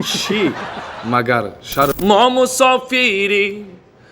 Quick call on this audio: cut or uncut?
cut